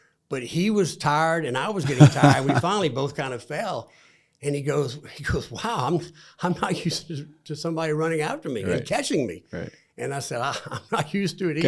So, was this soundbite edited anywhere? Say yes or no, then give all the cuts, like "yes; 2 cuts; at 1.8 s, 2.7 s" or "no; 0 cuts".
no; 0 cuts